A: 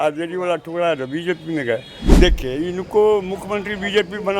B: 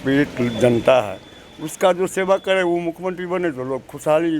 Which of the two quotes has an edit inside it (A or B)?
A